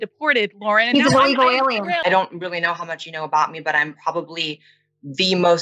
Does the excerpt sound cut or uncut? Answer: cut